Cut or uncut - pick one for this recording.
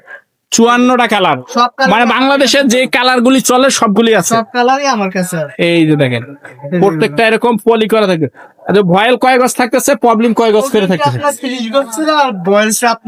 uncut